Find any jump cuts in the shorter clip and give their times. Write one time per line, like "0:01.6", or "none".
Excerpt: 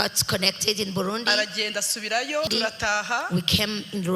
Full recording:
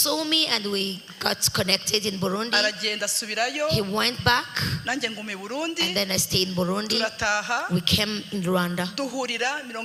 0:02.5